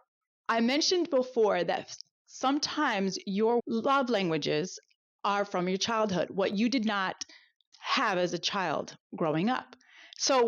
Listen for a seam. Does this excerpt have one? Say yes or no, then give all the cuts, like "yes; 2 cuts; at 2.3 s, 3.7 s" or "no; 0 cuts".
yes; 2 cuts; at 3.6 s, 7.6 s